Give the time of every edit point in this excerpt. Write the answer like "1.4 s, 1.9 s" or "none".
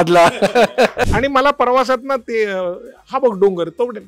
1.0 s